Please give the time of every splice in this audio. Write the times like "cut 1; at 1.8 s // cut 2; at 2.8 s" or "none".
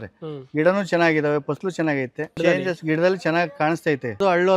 cut 1; at 2.3 s